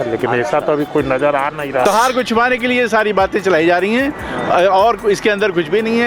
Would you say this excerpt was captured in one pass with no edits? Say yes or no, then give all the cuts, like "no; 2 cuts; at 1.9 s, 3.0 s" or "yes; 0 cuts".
no; 1 cut; at 1.8 s